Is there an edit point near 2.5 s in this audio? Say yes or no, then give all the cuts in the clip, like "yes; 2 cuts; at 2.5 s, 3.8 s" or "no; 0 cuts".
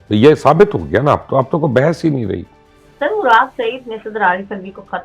no; 0 cuts